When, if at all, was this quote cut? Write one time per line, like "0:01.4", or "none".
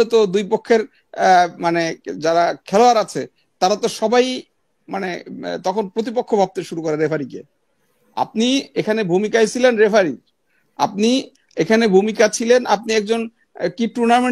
none